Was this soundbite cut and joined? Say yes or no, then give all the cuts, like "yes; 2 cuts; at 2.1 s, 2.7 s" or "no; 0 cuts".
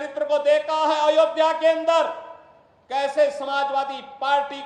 no; 0 cuts